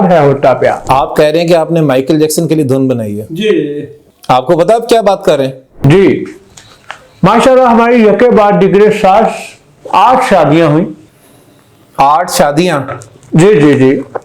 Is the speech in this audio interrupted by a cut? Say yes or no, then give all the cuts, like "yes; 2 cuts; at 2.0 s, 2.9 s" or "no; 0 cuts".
yes; 2 cuts; at 0.8 s, 5.8 s